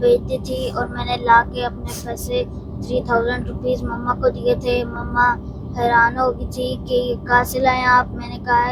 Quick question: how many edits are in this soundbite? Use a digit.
0